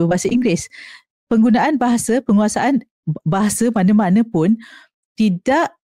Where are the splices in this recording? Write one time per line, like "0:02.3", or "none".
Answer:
none